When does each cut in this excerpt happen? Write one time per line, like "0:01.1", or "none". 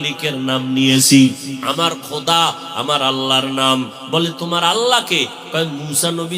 0:01.6